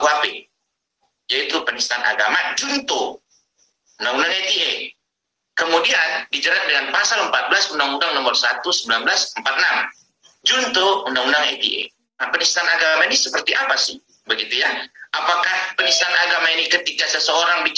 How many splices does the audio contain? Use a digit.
1